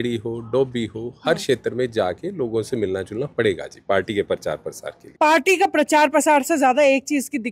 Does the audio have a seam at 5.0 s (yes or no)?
yes